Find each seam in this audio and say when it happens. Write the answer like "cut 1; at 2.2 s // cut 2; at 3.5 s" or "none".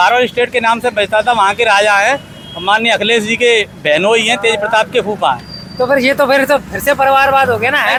none